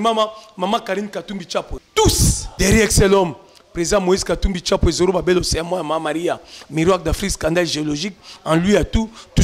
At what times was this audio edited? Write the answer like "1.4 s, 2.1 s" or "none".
1.8 s, 2.4 s